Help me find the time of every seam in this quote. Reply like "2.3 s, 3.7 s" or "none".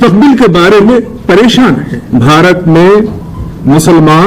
2.0 s